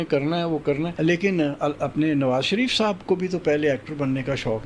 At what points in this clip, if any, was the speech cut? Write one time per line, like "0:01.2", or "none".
0:00.9